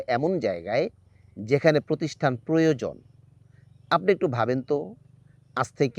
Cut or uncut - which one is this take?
uncut